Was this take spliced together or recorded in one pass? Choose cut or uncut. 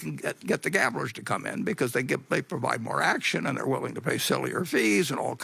uncut